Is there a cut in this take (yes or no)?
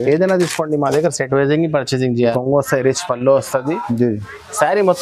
yes